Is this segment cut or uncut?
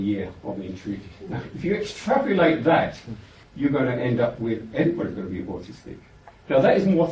cut